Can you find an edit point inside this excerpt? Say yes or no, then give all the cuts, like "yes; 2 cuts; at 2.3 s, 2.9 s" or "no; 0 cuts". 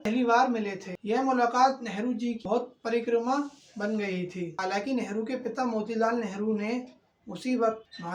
no; 0 cuts